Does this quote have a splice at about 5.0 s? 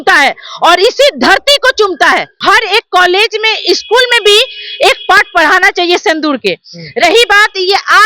no; 1 cut; at 2.3 s

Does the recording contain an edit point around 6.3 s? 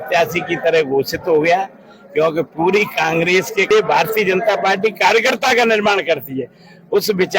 no; 1 cut; at 3.7 s

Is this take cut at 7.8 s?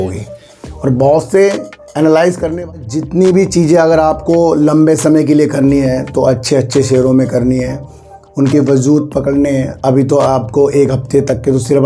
no; 1 cut; at 2.7 s

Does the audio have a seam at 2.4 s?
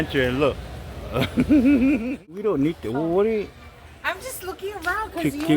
yes; 1 cut; at 2.4 s

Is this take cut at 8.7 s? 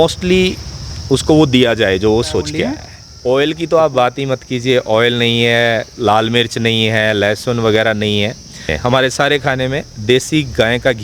yes; 2 cuts; at 2.7 s, 8.7 s

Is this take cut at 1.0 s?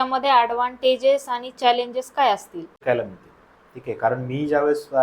no; 1 cut; at 2.7 s

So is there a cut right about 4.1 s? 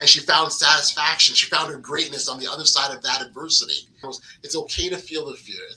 yes; 1 cut; at 4.1 s

